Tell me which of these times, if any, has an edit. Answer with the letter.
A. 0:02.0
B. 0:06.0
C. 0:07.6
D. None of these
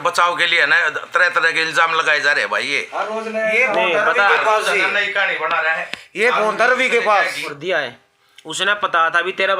C